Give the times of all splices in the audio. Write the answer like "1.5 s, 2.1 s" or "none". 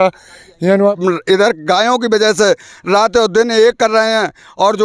1.0 s